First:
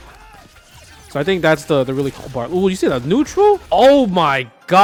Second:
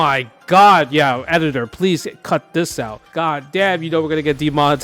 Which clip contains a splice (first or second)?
second